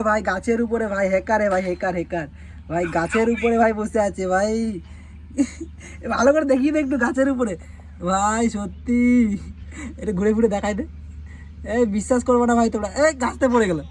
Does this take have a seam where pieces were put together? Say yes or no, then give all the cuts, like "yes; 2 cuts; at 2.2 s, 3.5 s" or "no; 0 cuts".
no; 0 cuts